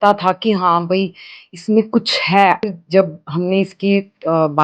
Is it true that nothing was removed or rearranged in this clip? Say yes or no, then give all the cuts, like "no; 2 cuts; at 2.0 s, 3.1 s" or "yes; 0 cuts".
no; 1 cut; at 2.7 s